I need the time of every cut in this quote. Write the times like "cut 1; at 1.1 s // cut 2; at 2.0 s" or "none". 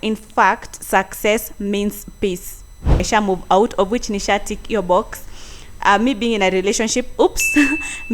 cut 1; at 3.0 s